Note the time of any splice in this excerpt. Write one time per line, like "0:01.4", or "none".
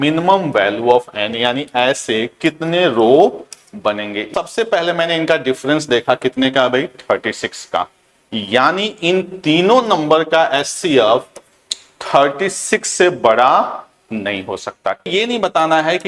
0:04.1
0:15.1